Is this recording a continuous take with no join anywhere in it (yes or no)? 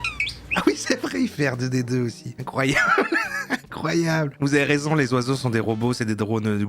no